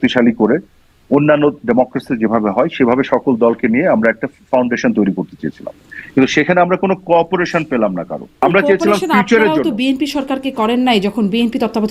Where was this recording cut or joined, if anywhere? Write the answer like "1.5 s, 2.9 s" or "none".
8.4 s